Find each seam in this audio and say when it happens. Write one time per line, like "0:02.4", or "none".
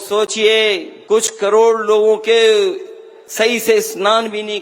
0:00.9